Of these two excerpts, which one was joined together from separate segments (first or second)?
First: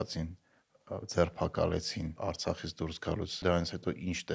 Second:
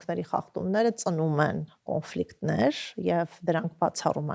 first